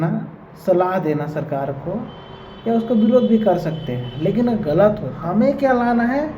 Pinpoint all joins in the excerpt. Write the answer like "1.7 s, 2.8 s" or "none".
5.1 s